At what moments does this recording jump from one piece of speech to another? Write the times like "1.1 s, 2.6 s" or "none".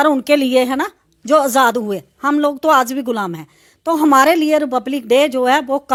none